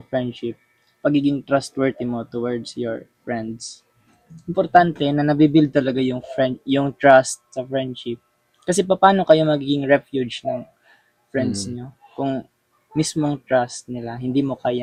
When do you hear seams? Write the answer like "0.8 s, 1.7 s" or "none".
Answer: none